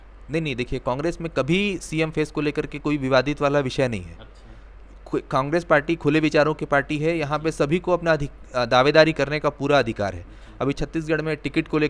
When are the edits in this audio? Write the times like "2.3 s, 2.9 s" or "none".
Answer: none